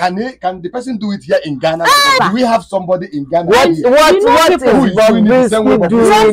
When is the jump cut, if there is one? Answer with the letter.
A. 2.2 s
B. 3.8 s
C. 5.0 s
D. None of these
A